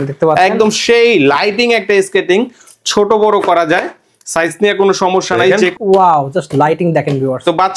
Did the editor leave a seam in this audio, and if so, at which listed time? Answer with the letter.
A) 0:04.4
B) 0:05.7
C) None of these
B